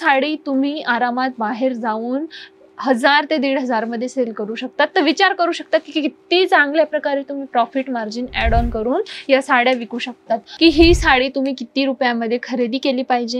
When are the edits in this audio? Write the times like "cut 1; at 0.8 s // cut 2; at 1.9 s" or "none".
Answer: cut 1; at 10.5 s